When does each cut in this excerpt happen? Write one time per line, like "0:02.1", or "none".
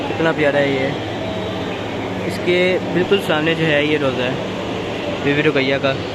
none